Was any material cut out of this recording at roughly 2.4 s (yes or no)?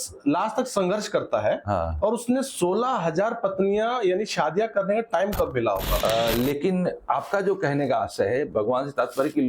no